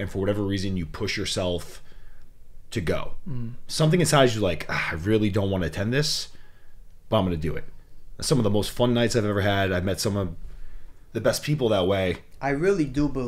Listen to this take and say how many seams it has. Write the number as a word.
one